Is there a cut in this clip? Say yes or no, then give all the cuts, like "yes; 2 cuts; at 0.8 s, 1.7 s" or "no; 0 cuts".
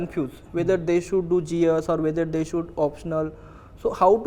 no; 0 cuts